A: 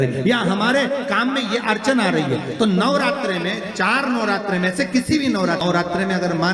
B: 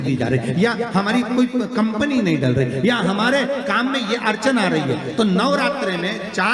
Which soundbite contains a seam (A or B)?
A